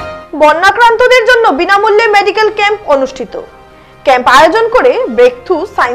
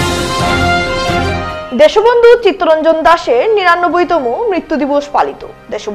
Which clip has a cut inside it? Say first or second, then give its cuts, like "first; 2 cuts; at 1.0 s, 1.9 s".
second; 1 cut; at 1.3 s